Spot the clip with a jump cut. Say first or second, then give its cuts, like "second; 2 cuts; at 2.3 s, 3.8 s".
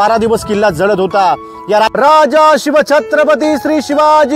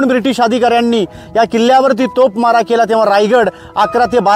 first; 1 cut; at 1.9 s